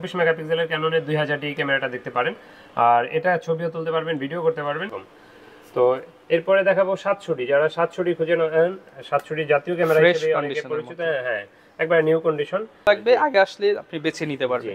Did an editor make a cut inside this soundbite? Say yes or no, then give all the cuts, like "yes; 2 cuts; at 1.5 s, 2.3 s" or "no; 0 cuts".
yes; 2 cuts; at 5.1 s, 12.9 s